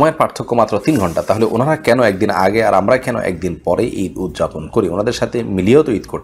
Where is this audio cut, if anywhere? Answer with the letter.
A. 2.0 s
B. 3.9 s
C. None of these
C